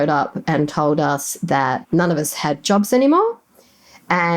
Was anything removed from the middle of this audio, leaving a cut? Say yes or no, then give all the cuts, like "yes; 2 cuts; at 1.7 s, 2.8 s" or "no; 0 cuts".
yes; 1 cut; at 1.8 s